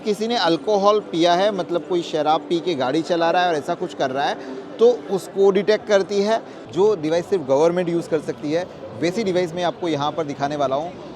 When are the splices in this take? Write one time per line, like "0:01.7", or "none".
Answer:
0:06.6